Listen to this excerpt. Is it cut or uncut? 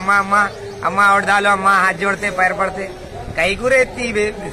uncut